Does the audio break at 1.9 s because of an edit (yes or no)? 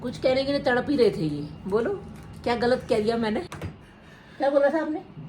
no